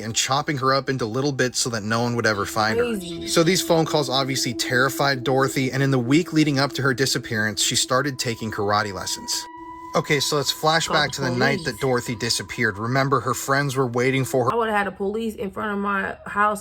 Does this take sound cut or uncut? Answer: cut